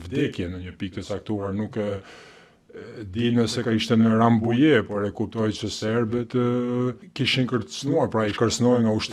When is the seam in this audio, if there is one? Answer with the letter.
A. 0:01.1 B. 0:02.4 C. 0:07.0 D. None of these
C